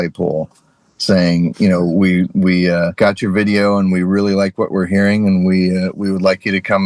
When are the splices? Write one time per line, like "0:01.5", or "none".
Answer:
0:02.9